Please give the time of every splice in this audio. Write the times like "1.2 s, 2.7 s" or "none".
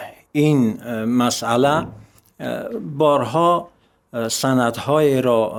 none